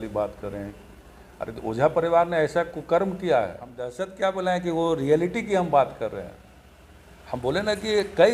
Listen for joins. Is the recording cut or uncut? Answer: cut